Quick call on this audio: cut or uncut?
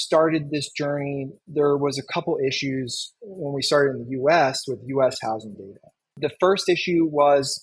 cut